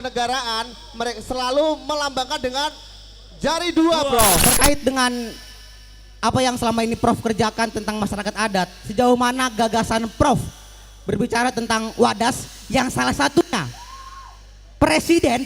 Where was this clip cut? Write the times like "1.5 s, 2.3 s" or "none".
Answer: 4.4 s